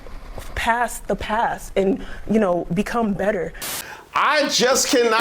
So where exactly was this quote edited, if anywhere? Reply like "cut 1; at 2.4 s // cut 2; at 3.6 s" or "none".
cut 1; at 3.8 s